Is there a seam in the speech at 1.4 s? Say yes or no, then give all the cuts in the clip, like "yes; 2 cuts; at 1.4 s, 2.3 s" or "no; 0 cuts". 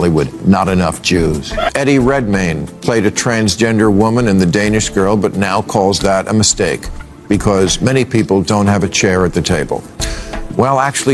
yes; 1 cut; at 1.4 s